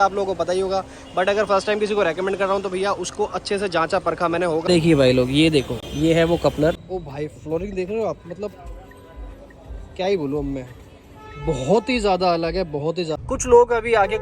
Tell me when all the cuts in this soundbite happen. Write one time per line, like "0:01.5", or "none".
0:04.7
0:06.8
0:13.2